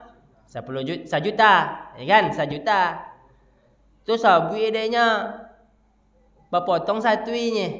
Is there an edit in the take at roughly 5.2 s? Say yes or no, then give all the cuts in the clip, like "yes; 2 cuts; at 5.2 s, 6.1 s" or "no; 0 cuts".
no; 0 cuts